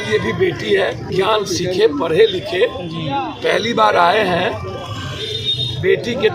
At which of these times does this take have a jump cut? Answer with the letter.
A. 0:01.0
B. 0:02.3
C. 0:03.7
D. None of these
A